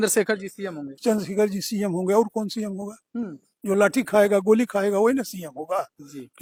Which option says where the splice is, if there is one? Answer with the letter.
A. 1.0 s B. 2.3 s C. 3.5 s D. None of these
D